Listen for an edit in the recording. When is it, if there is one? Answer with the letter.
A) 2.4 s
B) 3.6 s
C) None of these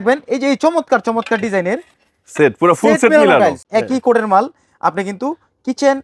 B